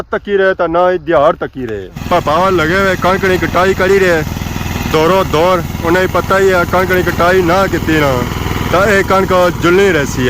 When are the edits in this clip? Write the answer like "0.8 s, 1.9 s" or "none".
1.8 s